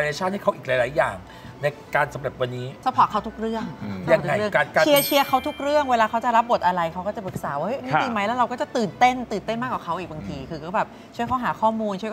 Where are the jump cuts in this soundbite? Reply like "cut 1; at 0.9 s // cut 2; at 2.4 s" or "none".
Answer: cut 1; at 2.8 s